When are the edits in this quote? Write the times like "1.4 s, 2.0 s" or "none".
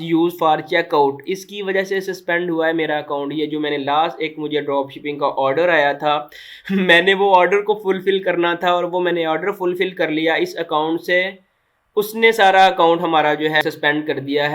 13.6 s